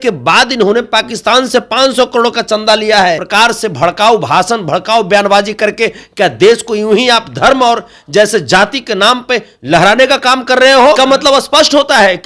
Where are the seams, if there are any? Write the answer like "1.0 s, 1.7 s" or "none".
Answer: 3.2 s, 11.0 s